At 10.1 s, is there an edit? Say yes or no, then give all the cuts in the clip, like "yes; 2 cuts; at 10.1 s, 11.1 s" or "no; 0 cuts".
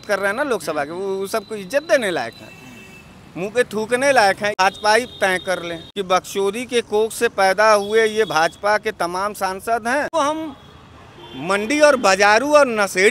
yes; 3 cuts; at 4.6 s, 5.8 s, 10.1 s